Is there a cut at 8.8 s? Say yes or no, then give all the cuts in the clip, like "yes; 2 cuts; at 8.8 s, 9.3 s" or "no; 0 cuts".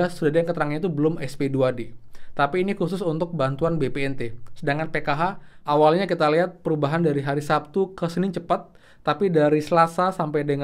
no; 1 cut; at 5.5 s